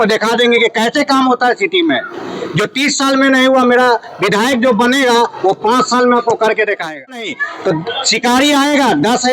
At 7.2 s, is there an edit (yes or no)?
yes